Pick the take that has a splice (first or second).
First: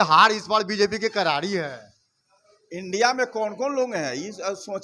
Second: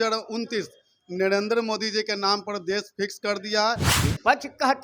second